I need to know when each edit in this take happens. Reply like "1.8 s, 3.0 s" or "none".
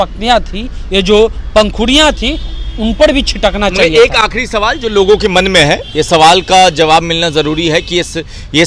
none

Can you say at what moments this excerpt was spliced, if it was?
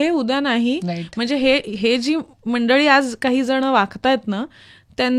none

